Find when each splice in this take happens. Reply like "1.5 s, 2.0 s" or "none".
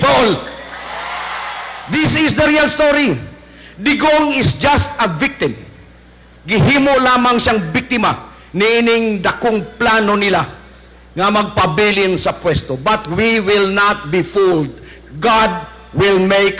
1.8 s